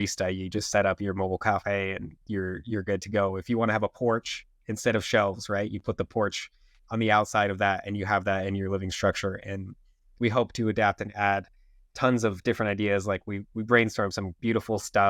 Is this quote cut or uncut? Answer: uncut